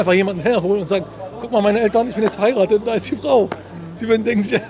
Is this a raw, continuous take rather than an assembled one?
yes; 0 cuts

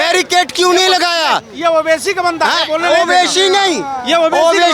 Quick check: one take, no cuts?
yes; 0 cuts

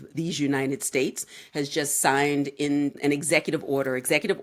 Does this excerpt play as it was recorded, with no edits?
no; 1 cut; at 3.0 s

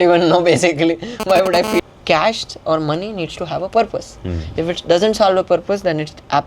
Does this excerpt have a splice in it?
yes; 1 cut; at 1.8 s

